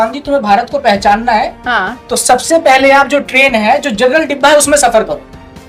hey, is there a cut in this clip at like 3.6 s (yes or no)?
no